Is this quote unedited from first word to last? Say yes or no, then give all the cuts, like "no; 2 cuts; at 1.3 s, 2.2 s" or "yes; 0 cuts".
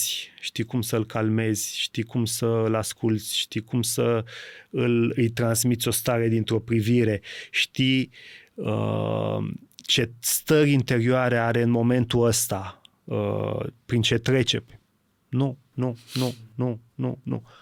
yes; 0 cuts